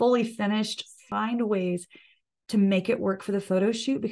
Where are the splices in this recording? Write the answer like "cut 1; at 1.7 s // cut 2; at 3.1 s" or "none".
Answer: cut 1; at 1.0 s